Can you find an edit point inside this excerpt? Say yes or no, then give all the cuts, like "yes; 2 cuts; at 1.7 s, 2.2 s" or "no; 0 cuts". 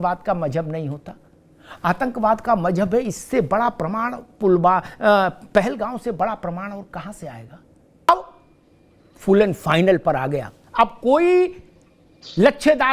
no; 0 cuts